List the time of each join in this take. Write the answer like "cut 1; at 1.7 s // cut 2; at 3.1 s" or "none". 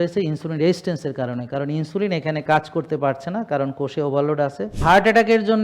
cut 1; at 4.7 s